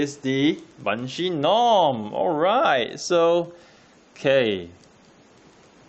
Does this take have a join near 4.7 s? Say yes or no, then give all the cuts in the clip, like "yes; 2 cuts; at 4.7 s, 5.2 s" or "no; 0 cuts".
yes; 1 cut; at 4.7 s